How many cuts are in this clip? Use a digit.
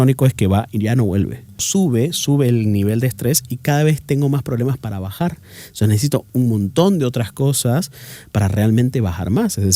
1